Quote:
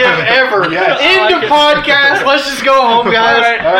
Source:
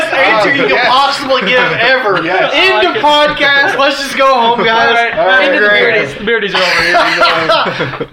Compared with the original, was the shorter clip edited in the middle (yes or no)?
no